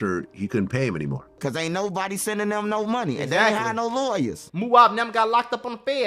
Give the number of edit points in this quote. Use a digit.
2